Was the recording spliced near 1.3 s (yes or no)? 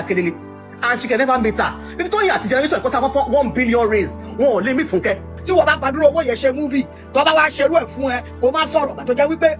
no